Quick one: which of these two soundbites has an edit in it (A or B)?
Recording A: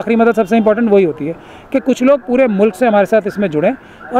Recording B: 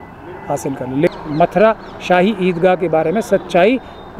B